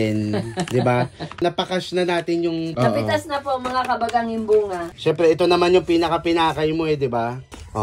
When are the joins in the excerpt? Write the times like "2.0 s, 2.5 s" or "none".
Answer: none